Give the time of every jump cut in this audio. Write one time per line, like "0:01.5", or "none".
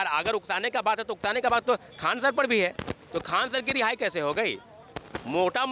none